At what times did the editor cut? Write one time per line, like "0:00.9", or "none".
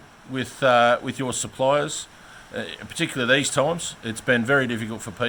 none

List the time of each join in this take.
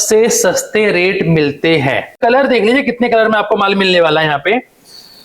0:02.2

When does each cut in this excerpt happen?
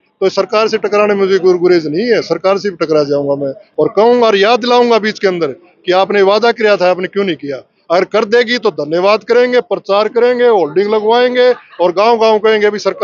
none

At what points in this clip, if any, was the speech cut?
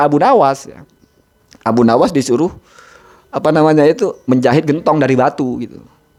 none

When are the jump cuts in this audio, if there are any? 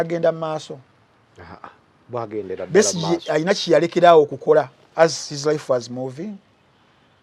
none

